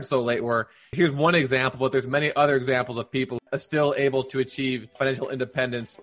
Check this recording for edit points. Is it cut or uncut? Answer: cut